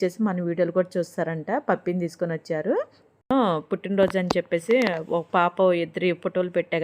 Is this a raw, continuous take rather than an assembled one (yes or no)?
no